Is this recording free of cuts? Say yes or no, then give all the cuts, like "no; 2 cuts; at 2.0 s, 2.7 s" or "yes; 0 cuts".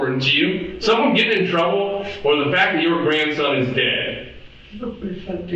yes; 0 cuts